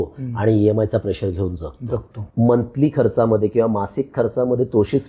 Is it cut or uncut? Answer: cut